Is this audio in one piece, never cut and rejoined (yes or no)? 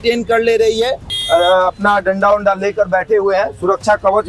no